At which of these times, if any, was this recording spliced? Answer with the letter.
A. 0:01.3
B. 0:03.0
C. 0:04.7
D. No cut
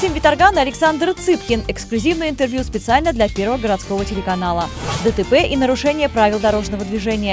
C